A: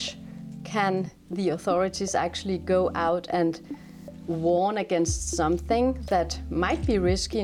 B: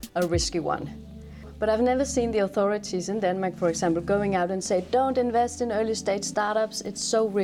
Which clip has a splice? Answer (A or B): B